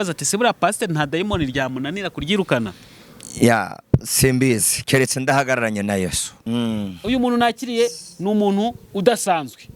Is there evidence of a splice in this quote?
yes; 1 cut; at 6.3 s

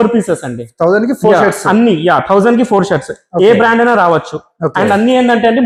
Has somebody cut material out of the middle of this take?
no; 0 cuts

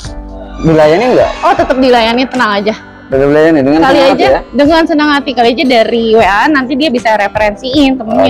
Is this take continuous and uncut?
yes; 0 cuts

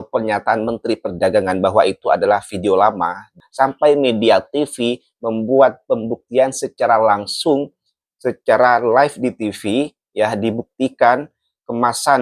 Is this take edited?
no; 0 cuts

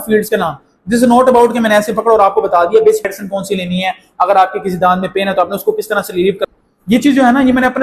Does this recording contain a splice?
yes; 2 cuts; at 3.1 s, 6.4 s

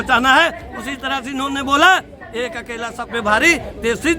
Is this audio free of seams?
yes; 0 cuts

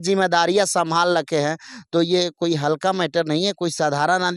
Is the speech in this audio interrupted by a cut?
no; 0 cuts

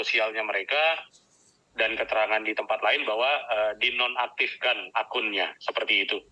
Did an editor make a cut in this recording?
no; 0 cuts

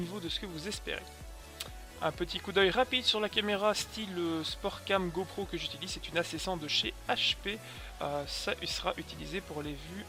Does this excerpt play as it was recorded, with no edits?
yes; 0 cuts

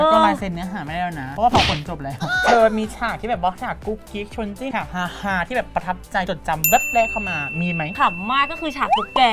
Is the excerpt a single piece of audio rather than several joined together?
no; 4 cuts; at 2.3 s, 4.7 s, 6.3 s, 7.9 s

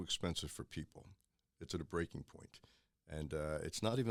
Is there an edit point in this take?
no; 0 cuts

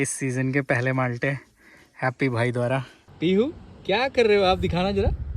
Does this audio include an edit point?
yes; 1 cut; at 3.0 s

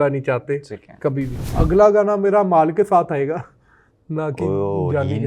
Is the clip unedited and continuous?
no; 1 cut; at 1.4 s

